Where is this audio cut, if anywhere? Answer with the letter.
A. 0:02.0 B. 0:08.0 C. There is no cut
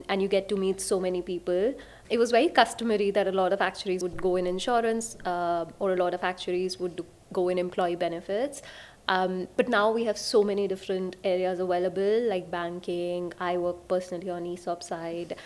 A